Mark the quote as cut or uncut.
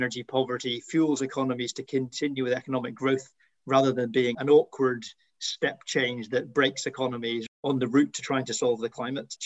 uncut